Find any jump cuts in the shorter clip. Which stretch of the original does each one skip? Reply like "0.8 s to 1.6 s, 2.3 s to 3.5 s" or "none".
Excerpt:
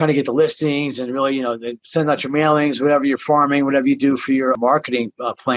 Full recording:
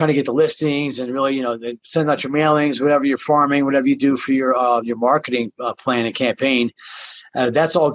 4.6 s to 5.0 s